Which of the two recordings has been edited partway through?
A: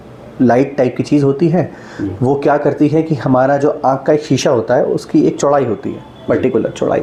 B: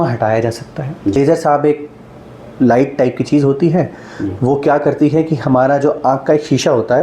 B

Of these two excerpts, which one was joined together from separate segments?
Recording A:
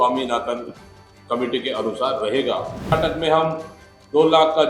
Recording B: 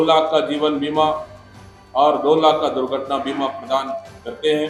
A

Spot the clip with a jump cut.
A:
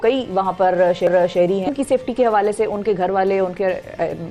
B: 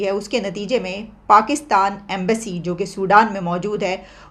A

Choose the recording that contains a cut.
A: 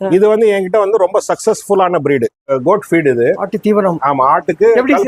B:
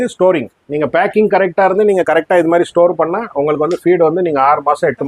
A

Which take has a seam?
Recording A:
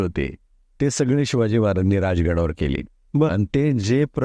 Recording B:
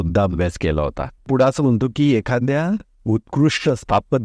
B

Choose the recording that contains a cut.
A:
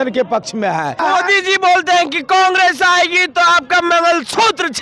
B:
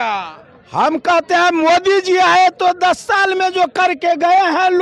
A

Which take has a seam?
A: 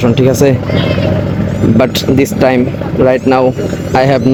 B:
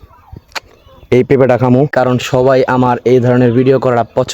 B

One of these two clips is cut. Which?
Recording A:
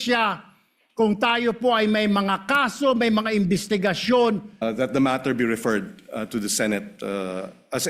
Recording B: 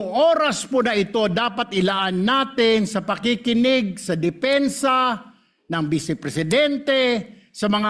A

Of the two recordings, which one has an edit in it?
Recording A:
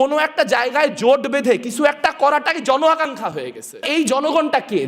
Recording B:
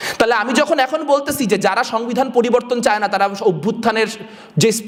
A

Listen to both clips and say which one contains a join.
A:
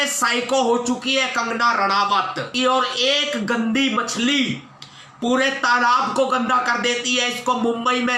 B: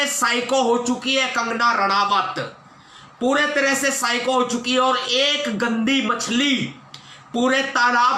A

